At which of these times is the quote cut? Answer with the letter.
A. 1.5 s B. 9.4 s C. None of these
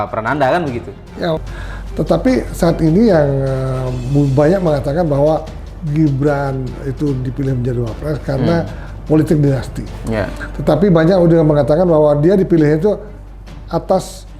A